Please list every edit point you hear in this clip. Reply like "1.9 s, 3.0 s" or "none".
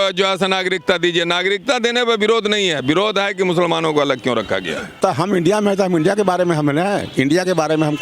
5.0 s